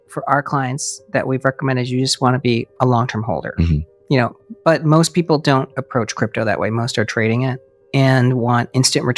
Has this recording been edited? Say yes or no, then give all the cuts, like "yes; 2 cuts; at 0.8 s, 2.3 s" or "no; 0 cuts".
no; 0 cuts